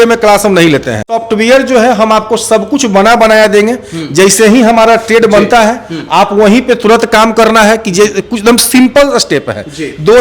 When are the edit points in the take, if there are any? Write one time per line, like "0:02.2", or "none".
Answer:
0:01.1